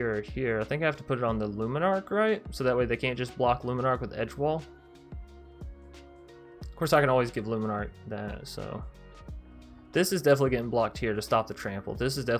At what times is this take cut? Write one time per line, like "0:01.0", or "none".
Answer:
none